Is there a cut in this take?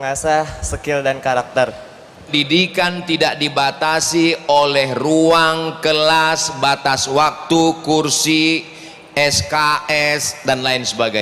yes; 1 cut; at 2.3 s

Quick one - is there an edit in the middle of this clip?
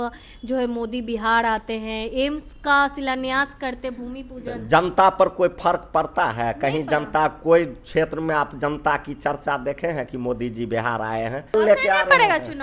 yes; 1 cut; at 11.5 s

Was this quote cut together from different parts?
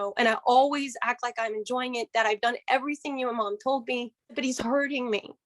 yes; 1 cut; at 4.4 s

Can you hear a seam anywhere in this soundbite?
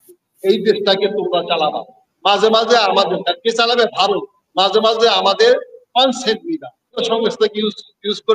yes; 1 cut; at 7.0 s

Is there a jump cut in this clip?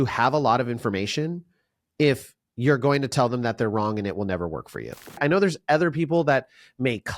yes; 1 cut; at 5.2 s

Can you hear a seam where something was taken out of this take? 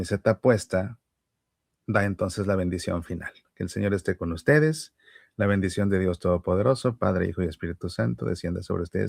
no; 0 cuts

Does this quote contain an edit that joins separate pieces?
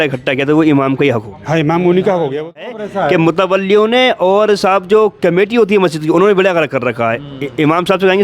yes; 1 cut; at 2.8 s

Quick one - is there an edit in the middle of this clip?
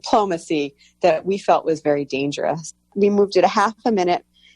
yes; 1 cut; at 2.8 s

